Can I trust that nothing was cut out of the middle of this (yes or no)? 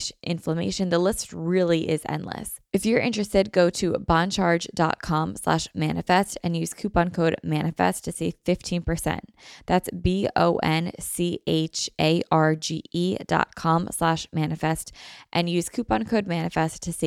no